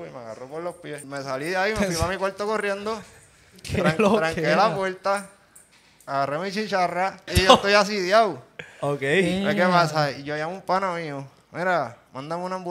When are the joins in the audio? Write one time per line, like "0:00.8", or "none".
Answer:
0:01.0
0:07.3